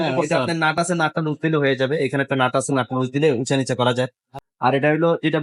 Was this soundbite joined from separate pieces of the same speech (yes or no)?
yes